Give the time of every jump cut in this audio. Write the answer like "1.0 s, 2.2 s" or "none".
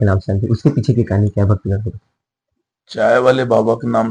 none

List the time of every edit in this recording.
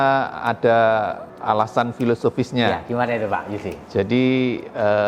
none

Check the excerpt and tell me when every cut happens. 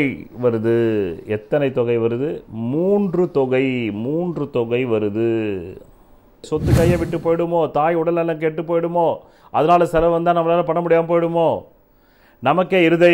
6.5 s

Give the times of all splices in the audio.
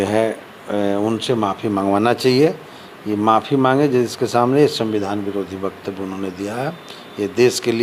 none

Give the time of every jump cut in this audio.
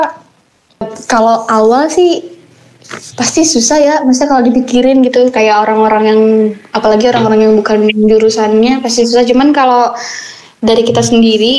1.0 s

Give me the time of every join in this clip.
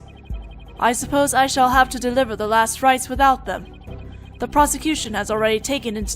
3.0 s

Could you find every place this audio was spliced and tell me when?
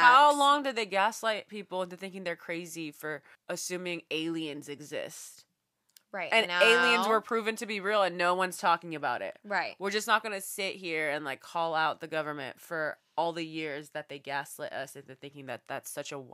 3.3 s

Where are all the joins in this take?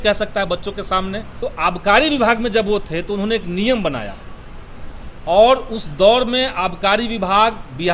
1.2 s

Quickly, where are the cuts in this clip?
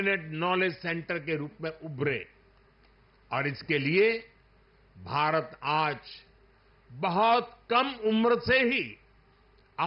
none

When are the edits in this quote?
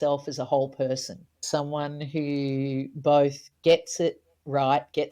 1.3 s

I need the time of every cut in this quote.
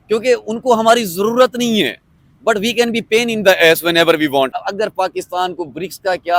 4.5 s

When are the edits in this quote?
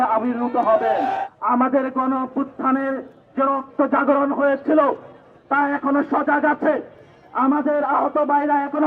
none

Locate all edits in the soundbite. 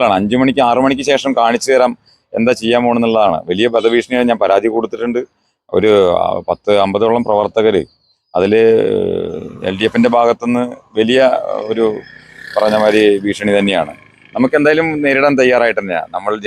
none

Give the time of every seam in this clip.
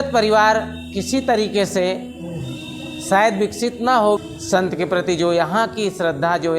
4.2 s

